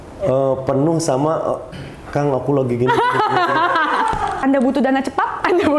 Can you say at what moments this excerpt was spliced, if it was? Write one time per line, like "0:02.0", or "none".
0:04.4